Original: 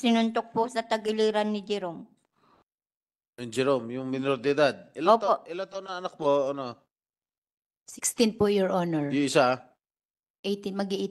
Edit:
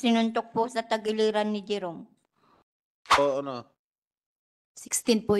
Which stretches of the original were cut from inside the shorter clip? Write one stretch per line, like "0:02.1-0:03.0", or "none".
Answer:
0:03.2-0:06.3